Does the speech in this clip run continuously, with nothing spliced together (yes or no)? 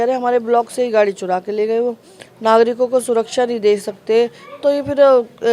yes